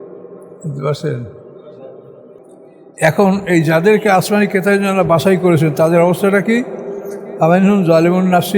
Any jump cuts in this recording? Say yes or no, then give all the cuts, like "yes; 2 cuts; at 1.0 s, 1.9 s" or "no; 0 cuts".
yes; 1 cut; at 2.4 s